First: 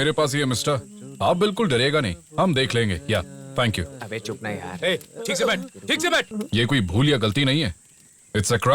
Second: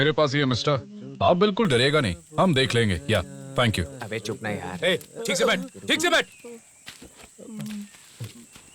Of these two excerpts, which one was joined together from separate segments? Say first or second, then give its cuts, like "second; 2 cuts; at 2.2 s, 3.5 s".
first; 1 cut; at 6.3 s